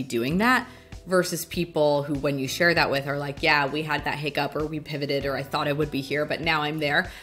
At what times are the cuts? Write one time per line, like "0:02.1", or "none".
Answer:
none